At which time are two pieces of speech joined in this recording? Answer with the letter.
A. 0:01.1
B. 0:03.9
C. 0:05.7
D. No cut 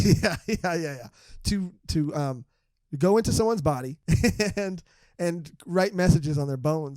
B